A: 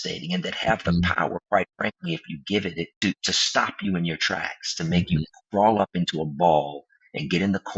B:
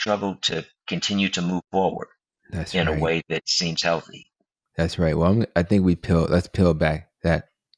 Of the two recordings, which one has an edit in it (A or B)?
A